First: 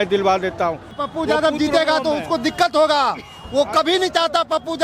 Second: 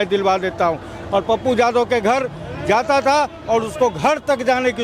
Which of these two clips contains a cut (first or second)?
first